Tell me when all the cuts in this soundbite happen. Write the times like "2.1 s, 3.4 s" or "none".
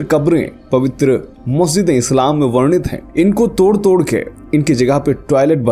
none